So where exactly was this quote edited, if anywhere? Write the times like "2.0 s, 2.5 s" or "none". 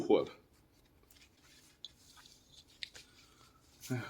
1.4 s

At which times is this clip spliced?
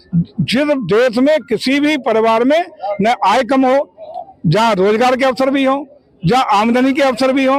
none

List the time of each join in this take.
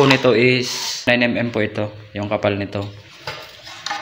1.1 s

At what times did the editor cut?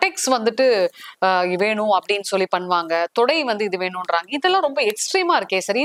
none

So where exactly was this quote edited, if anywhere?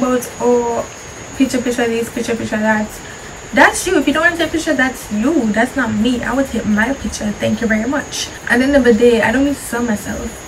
none

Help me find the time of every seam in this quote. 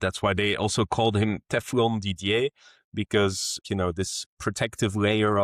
3.6 s

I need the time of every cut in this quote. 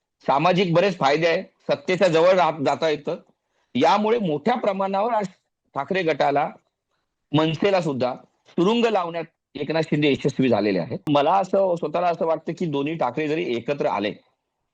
11.1 s

